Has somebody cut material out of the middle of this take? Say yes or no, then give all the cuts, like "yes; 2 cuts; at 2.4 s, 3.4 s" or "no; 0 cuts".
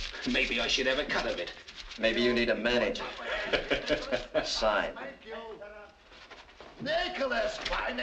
no; 0 cuts